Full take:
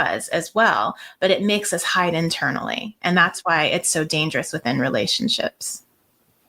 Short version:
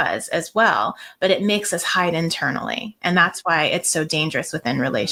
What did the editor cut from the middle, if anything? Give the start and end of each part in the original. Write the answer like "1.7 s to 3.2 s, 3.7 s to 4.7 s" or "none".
none